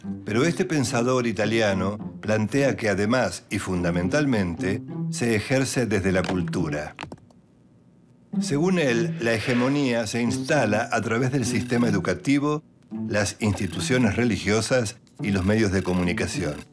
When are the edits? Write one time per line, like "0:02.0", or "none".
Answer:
0:13.6